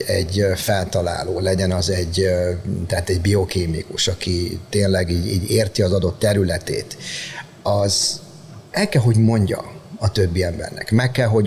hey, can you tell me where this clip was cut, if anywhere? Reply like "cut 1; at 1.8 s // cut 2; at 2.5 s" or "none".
none